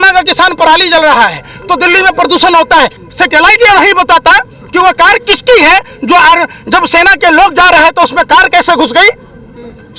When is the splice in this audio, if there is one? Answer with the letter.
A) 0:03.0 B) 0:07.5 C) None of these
A